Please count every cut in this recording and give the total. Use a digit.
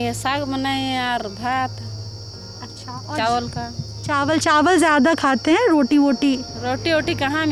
0